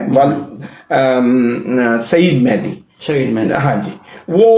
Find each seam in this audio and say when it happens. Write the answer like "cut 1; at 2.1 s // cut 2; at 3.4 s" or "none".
none